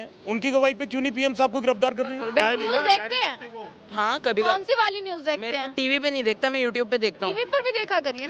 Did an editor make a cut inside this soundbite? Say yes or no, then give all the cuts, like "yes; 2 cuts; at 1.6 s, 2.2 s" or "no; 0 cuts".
yes; 1 cut; at 2.4 s